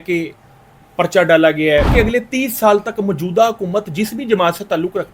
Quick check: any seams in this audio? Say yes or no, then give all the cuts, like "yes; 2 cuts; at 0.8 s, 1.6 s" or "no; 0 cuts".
yes; 1 cut; at 1.9 s